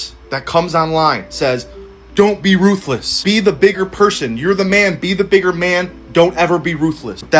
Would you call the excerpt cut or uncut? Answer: cut